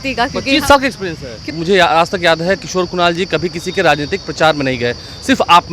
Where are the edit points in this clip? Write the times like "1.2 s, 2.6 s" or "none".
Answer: 1.5 s